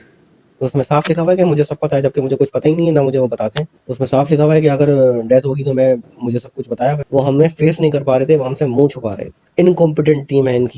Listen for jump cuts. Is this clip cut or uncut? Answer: cut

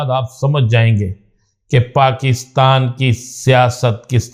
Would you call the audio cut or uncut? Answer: uncut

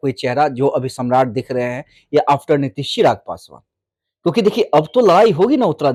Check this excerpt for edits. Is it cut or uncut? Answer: uncut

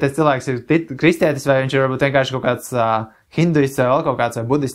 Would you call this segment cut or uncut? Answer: uncut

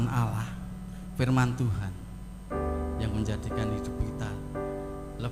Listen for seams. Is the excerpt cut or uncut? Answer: uncut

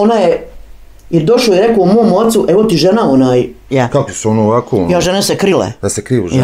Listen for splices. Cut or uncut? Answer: cut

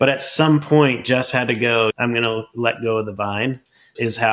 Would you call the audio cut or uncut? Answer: cut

